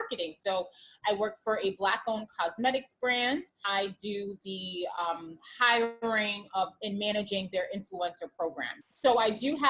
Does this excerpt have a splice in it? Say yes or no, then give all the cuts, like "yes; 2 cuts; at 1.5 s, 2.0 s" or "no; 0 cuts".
yes; 2 cuts; at 3.6 s, 8.7 s